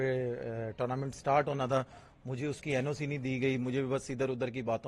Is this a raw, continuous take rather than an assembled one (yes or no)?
yes